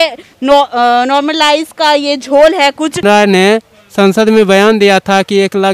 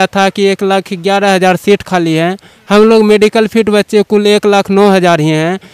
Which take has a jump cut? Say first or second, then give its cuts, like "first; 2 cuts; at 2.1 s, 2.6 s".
first; 1 cut; at 3.0 s